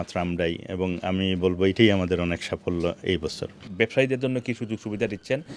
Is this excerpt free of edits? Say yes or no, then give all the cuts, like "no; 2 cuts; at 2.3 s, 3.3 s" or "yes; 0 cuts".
no; 1 cut; at 3.7 s